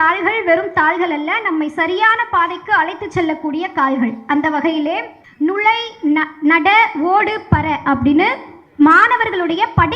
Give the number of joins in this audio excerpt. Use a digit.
0